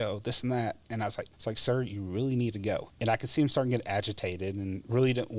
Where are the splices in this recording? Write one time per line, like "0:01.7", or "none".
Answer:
0:01.3
0:02.9